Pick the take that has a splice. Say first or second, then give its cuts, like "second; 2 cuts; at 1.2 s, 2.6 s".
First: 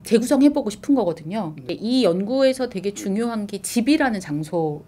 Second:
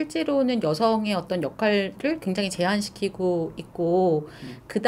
first; 1 cut; at 1.7 s